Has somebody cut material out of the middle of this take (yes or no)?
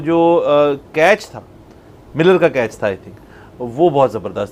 no